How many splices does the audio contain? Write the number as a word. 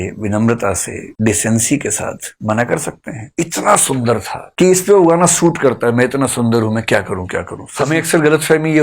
two